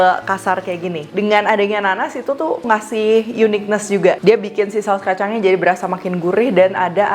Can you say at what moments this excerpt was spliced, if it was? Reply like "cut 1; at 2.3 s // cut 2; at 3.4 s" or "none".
cut 1; at 1.0 s // cut 2; at 2.6 s